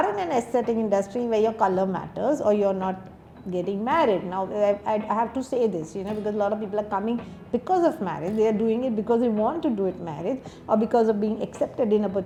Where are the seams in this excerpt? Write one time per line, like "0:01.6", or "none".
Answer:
none